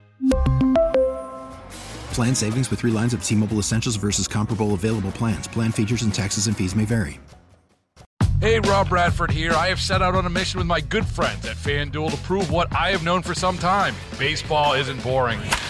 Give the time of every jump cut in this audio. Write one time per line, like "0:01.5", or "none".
0:08.0